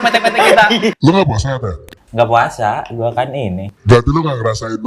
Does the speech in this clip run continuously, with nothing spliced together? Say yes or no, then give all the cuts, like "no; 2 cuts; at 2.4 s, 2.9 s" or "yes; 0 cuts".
no; 2 cuts; at 0.9 s, 3.8 s